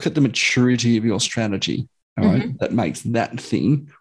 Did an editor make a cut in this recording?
no; 0 cuts

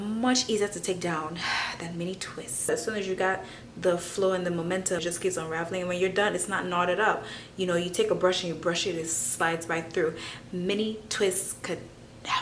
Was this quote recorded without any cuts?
no; 2 cuts; at 2.7 s, 5.0 s

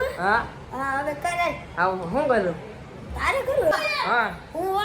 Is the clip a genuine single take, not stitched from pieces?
no; 1 cut; at 3.7 s

